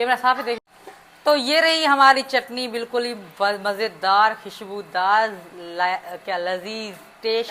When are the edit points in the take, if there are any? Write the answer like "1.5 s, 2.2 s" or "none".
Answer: none